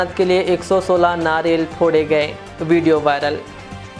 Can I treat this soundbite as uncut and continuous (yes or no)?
yes